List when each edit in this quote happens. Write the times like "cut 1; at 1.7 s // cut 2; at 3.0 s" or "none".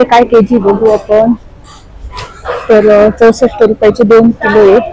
none